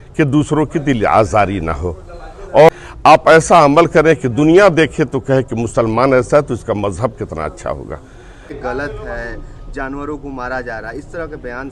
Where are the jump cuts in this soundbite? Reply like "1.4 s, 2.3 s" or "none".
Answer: 2.7 s, 8.5 s